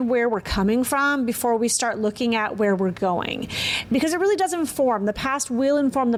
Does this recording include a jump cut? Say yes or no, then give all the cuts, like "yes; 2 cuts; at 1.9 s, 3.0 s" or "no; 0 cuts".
no; 0 cuts